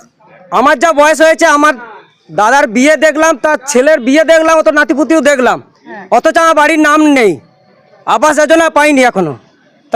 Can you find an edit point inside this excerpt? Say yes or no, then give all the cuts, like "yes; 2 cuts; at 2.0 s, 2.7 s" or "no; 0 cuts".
no; 0 cuts